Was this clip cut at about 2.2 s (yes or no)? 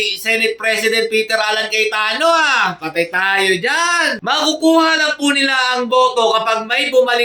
no